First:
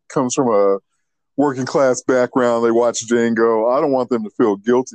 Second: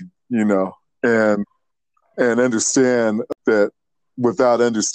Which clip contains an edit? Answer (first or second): second